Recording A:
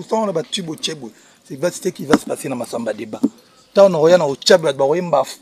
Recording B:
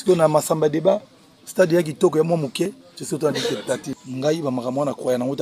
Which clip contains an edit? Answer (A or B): B